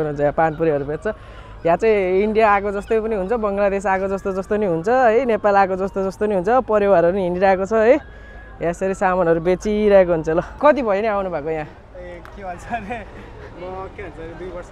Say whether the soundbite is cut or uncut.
cut